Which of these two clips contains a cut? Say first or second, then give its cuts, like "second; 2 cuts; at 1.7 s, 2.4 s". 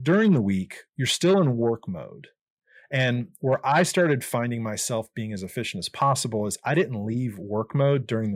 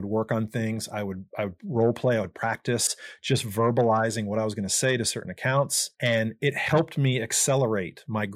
second; 1 cut; at 5.8 s